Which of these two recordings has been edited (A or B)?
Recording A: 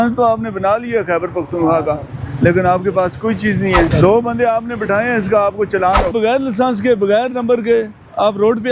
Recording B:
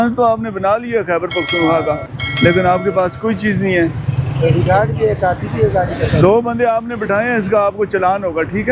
A